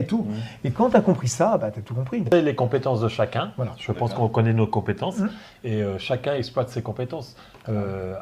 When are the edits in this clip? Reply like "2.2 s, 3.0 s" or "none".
2.3 s